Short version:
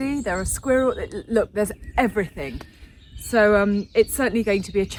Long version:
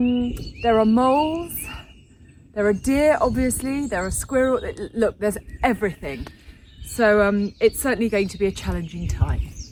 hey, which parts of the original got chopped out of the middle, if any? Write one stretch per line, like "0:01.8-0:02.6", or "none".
none